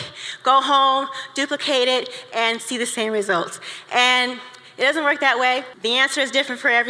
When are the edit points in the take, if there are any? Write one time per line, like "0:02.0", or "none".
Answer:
0:05.7